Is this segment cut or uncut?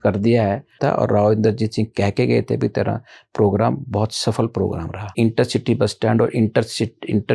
cut